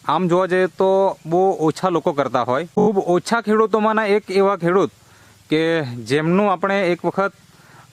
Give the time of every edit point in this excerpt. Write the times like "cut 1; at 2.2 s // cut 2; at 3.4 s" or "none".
cut 1; at 2.7 s